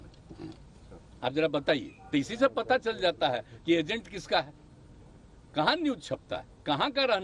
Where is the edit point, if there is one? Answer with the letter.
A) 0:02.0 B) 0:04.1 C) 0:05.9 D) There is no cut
D